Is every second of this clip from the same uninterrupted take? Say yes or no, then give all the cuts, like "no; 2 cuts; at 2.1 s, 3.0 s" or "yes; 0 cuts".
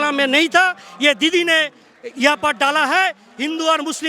yes; 0 cuts